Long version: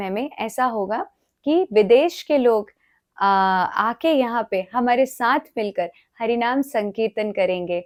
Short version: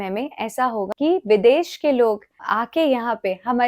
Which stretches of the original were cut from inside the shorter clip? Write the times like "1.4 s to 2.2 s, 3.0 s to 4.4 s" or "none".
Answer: 0.9 s to 1.4 s, 2.9 s to 3.7 s